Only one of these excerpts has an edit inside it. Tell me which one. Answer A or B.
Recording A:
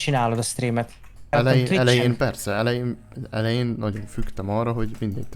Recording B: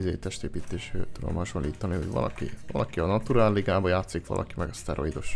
A